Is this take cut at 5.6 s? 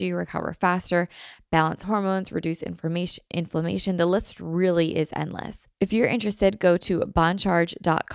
yes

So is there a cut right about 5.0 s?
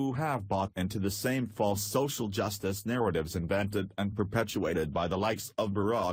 yes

